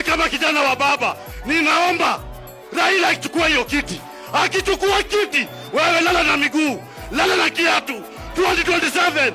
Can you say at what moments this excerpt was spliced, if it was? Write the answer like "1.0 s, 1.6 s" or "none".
none